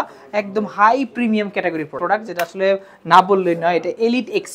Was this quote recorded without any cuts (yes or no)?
no